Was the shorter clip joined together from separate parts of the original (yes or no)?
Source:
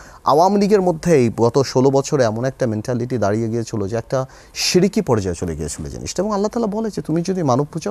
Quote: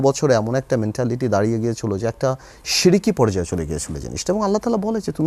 no